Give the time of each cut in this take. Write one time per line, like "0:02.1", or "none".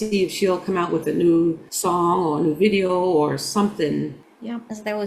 0:01.7
0:04.1